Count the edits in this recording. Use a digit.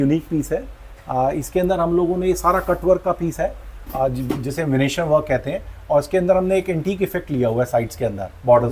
0